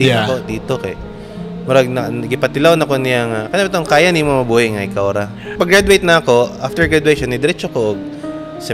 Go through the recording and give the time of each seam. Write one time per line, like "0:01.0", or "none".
0:05.4